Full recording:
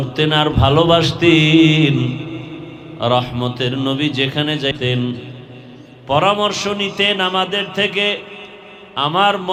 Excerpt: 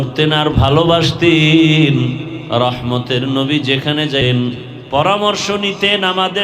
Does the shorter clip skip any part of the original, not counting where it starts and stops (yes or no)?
yes